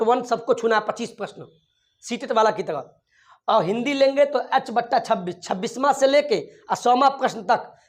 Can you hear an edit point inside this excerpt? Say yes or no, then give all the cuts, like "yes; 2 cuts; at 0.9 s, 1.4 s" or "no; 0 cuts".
no; 0 cuts